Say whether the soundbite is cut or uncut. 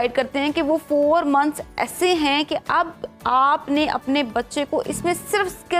uncut